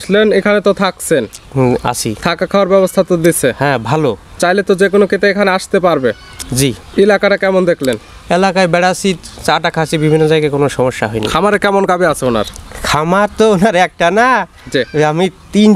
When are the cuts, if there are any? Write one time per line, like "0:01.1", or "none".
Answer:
none